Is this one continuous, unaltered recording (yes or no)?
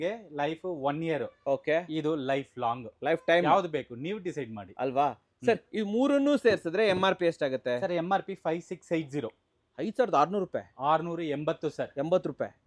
yes